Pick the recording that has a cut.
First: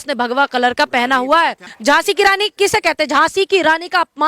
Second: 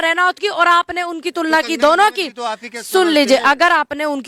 first; 1 cut; at 1.7 s

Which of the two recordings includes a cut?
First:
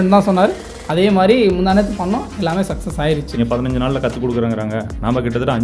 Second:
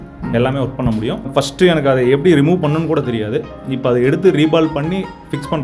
first; 1 cut; at 3.4 s

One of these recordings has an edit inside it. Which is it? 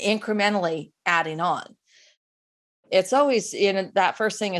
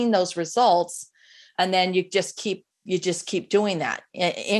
first; 1 cut; at 2.2 s

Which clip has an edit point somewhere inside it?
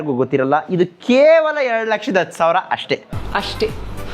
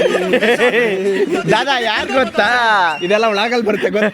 first; 1 cut; at 3.1 s

